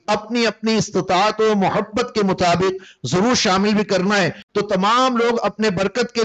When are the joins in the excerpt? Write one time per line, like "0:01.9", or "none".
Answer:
0:04.4